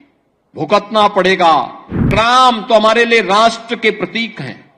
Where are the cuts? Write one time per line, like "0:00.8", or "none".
0:02.1